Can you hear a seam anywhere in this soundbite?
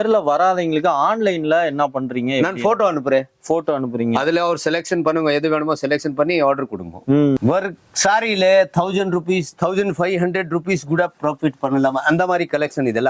yes; 1 cut; at 7.4 s

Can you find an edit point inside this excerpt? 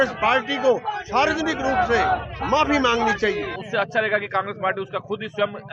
yes; 1 cut; at 3.6 s

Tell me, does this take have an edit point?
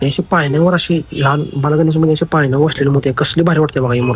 no; 0 cuts

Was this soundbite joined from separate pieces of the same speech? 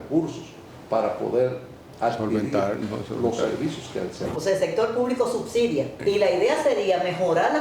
yes; 2 cuts; at 4.2 s, 5.9 s

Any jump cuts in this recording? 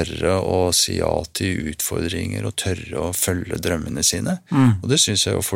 no; 0 cuts

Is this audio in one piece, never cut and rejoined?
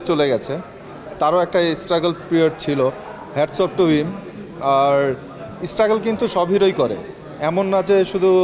yes; 0 cuts

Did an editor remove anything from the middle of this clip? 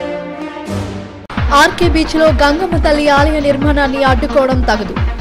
no; 0 cuts

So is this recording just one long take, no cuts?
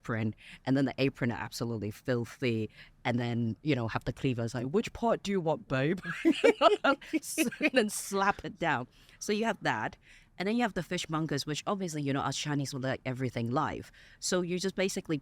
yes; 0 cuts

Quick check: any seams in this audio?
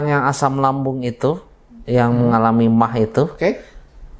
no; 0 cuts

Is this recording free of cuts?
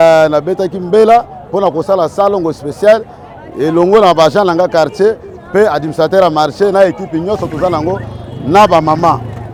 yes; 0 cuts

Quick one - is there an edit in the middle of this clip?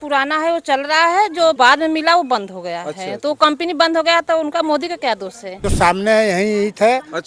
yes; 2 cuts; at 1.6 s, 5.7 s

